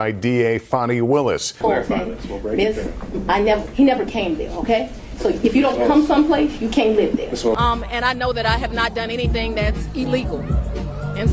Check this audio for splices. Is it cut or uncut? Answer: cut